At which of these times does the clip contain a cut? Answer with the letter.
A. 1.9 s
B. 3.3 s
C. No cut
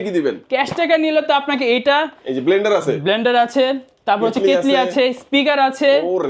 C